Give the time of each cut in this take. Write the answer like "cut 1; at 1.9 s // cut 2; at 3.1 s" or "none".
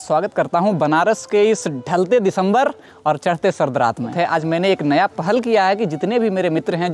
cut 1; at 4.1 s